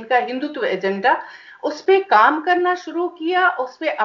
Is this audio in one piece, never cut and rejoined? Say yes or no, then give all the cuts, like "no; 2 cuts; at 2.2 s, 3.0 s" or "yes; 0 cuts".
yes; 0 cuts